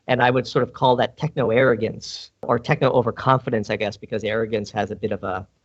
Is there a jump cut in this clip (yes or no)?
yes